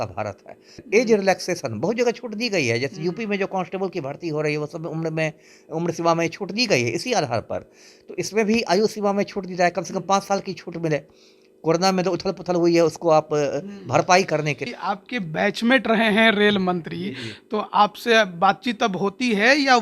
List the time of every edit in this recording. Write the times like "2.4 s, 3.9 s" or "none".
0.8 s, 14.7 s